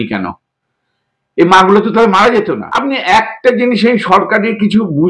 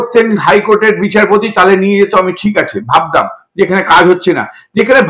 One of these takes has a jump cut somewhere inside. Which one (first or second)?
first